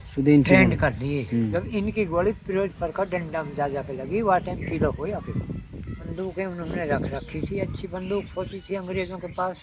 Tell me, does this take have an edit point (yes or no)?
yes